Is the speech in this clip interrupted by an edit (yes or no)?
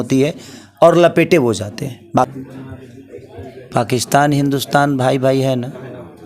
yes